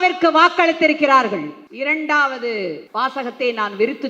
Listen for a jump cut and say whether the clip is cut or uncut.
cut